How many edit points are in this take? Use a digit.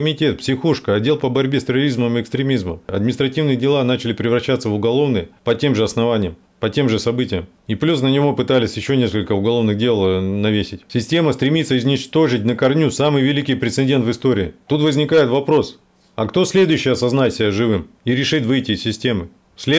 1